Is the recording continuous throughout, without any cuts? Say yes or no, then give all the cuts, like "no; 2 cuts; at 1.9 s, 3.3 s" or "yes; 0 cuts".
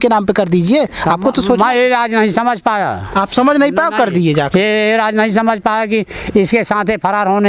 yes; 0 cuts